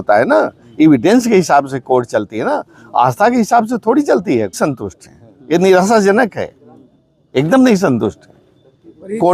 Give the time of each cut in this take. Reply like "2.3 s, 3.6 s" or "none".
2.1 s, 4.6 s